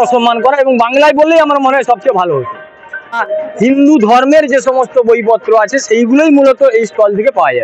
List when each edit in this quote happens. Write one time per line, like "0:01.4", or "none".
0:03.2